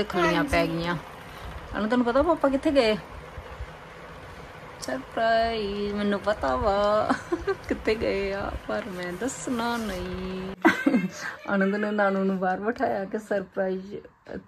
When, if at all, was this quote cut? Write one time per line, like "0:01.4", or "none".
0:10.5

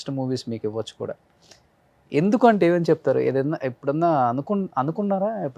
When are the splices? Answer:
none

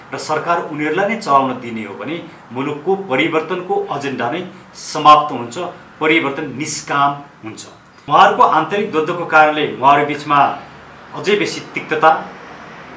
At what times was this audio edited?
0:08.0

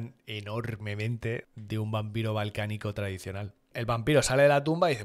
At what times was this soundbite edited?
0:01.5
0:03.7

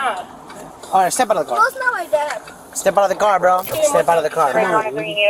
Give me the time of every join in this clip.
0:03.7

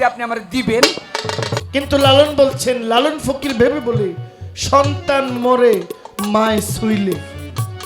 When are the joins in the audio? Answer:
0:01.6

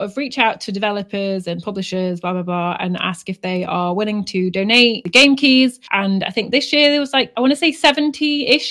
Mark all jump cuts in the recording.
none

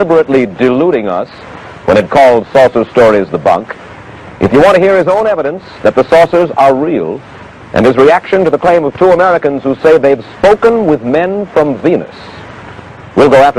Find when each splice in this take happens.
0:10.8

